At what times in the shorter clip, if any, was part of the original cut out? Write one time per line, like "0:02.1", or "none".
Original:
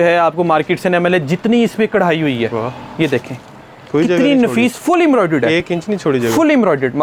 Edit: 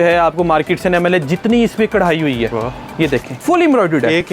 0:03.4